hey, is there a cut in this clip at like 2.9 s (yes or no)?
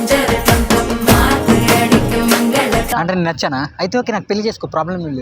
yes